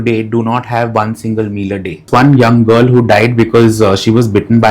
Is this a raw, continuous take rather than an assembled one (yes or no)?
no